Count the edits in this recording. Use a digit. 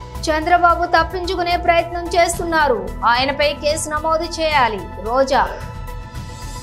1